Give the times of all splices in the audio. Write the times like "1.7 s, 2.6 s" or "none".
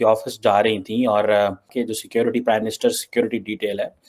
1.7 s